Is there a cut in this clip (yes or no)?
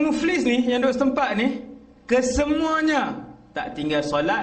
no